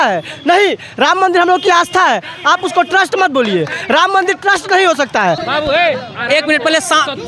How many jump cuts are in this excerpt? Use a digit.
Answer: 1